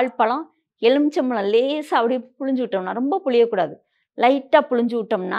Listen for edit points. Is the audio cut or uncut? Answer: uncut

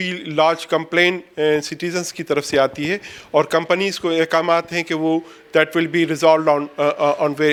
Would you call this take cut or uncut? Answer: uncut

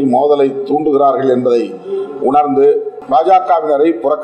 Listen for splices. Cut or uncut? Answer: cut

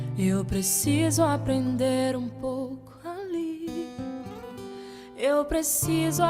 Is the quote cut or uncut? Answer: uncut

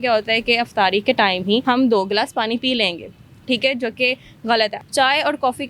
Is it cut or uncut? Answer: cut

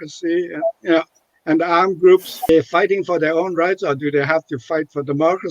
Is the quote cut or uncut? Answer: cut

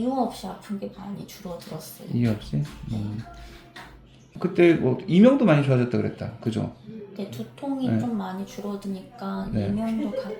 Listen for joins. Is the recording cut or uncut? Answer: cut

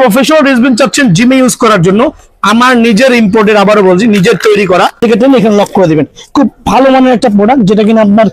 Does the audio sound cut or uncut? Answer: cut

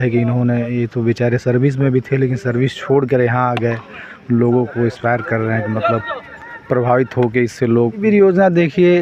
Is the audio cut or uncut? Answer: cut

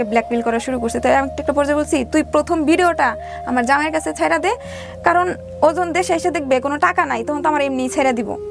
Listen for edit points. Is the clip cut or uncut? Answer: uncut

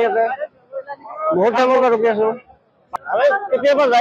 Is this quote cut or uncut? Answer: cut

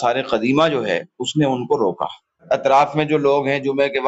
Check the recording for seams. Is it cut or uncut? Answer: cut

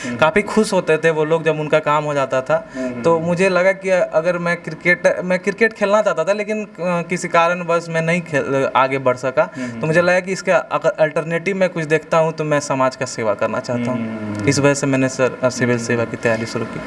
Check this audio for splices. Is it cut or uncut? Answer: uncut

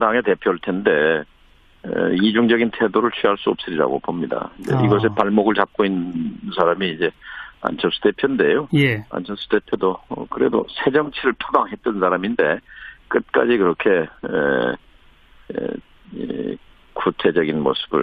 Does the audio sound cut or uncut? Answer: uncut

